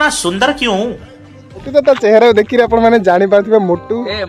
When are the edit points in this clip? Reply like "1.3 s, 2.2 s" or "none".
1.7 s